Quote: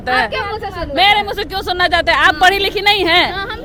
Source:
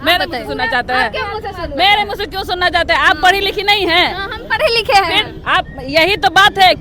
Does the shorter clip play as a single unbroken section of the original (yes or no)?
yes